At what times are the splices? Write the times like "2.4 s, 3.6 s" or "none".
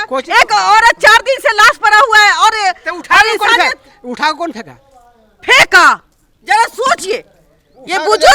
none